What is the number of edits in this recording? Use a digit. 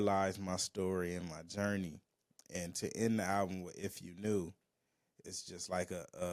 0